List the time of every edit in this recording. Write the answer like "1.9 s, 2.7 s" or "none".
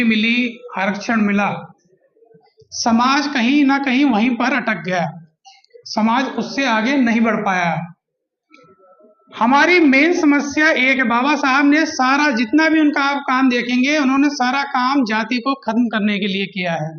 none